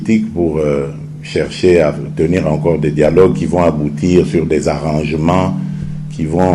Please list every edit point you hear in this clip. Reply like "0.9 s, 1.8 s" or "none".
none